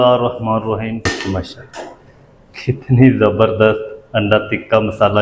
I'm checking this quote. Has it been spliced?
yes; 1 cut; at 1.0 s

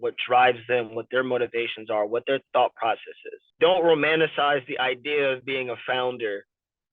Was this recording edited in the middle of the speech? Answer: yes; 1 cut; at 3.5 s

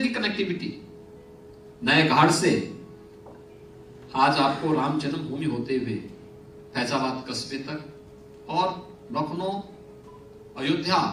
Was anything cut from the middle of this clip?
no; 0 cuts

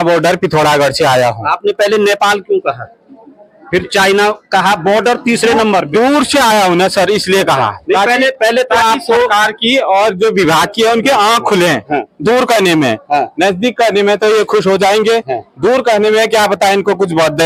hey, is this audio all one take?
yes; 0 cuts

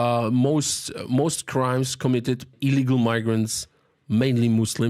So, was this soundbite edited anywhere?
yes; 1 cut; at 2.6 s

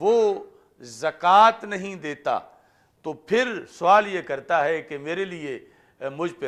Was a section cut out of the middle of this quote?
no; 0 cuts

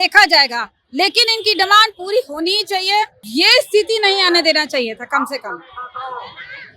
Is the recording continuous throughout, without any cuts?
no; 1 cut; at 3.2 s

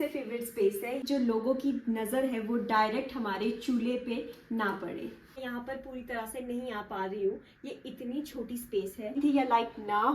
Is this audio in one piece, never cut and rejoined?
no; 3 cuts; at 1.0 s, 5.2 s, 9.2 s

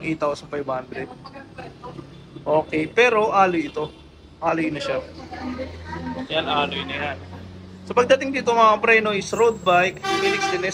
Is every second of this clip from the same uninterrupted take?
yes; 0 cuts

